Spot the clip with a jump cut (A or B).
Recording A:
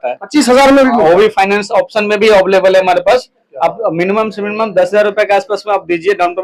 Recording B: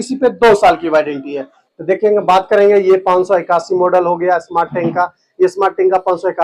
B